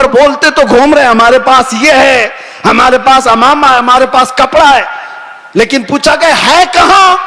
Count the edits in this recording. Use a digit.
0